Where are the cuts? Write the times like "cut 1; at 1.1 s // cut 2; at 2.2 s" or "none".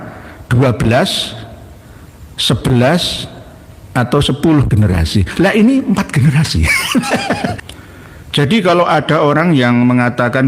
cut 1; at 7.6 s